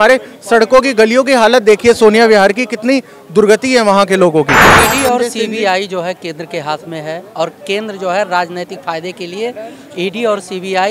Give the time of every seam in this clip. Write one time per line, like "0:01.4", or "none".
0:04.7